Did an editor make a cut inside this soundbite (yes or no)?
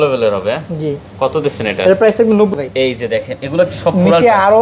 yes